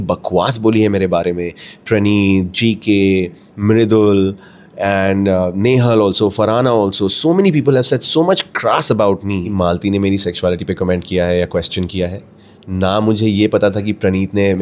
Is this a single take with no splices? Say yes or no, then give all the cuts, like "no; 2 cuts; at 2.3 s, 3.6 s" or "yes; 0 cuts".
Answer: no; 1 cut; at 9.5 s